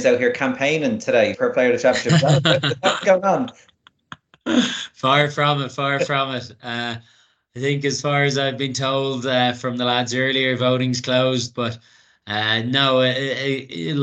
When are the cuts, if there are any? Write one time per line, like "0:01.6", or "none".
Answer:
0:01.4